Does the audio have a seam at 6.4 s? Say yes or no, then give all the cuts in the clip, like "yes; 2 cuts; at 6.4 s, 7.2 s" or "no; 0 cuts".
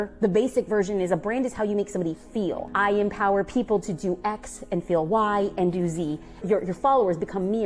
yes; 2 cuts; at 2.7 s, 6.4 s